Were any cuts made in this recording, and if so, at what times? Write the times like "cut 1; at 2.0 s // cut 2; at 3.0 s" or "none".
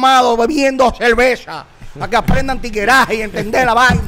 none